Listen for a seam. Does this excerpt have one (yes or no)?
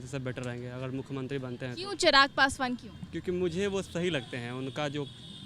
no